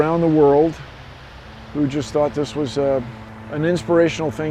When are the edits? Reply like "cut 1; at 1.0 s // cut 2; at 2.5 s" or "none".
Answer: none